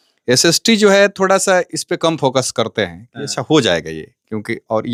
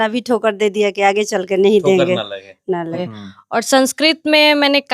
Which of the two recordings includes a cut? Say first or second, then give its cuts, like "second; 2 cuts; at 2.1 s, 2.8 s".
second; 1 cut; at 3.0 s